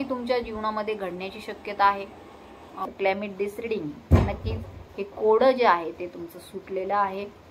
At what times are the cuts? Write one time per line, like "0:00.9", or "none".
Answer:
0:02.9